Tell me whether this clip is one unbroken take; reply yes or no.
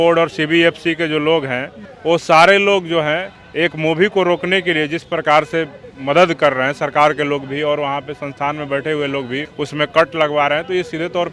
yes